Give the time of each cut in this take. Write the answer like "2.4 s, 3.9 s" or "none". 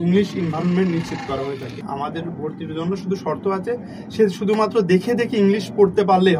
1.8 s